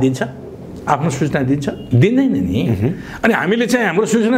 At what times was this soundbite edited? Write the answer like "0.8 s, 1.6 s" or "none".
1.8 s